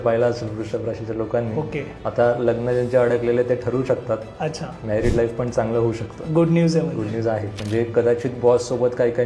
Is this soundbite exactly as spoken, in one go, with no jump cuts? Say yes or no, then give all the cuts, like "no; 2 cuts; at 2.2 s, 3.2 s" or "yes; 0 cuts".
no; 1 cut; at 7.5 s